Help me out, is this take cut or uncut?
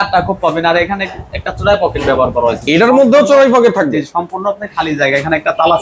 uncut